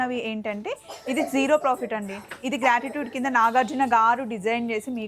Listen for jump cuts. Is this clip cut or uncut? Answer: uncut